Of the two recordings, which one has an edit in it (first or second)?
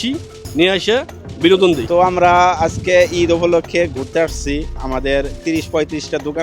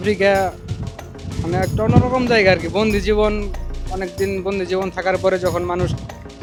first